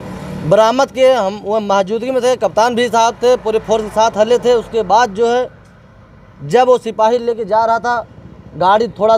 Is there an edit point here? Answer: no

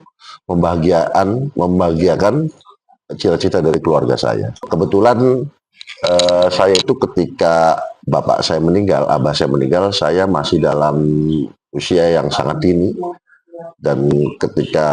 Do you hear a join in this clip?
yes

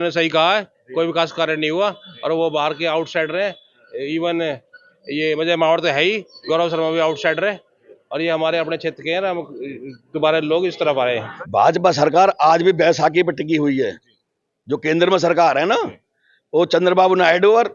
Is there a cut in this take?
yes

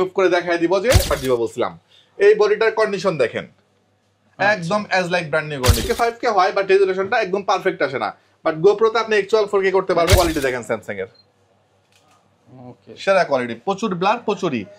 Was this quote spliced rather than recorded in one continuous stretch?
yes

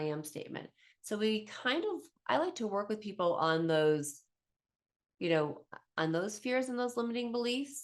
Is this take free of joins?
yes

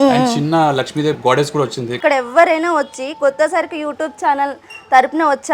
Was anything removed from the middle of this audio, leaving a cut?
yes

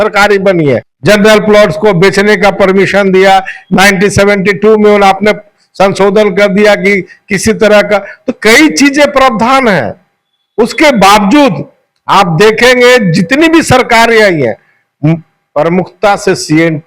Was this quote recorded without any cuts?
no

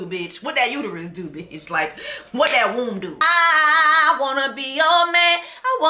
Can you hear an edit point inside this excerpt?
yes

